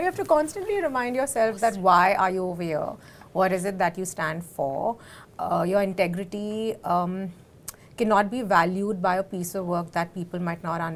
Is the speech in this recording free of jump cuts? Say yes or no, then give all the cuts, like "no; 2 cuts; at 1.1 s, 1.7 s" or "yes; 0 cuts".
yes; 0 cuts